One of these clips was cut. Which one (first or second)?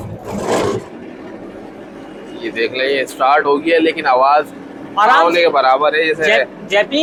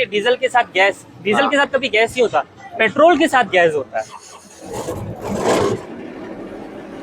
second